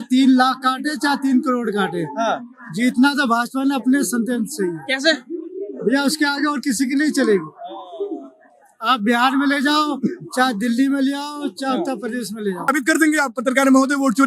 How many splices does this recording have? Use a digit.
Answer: 1